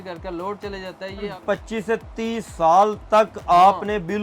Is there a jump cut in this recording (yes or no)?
yes